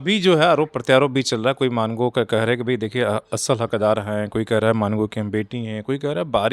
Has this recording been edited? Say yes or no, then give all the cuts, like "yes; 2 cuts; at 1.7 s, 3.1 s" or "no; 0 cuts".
no; 0 cuts